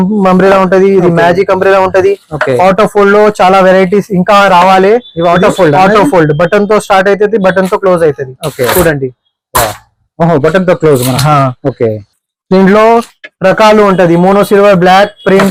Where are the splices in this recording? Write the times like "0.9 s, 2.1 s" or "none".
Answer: none